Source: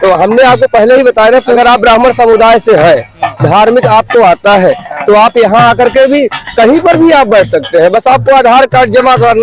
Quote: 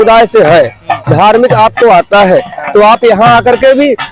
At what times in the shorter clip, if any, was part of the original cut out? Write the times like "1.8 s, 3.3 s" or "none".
none